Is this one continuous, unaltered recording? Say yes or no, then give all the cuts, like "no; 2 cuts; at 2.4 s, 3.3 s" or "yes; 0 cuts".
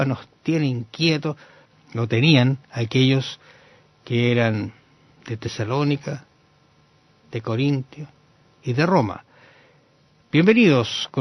no; 1 cut; at 4.8 s